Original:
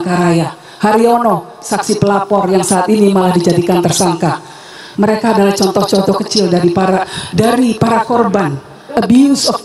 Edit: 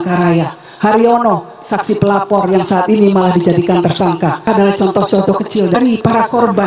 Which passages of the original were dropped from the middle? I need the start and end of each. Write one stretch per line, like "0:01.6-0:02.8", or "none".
0:04.4-0:05.2
0:06.5-0:07.5